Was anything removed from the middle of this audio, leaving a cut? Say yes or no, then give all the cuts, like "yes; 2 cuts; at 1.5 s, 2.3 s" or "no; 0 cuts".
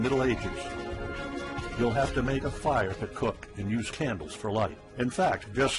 yes; 1 cut; at 4.2 s